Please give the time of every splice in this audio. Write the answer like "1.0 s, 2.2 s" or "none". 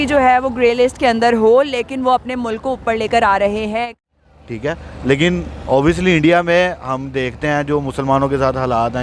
3.9 s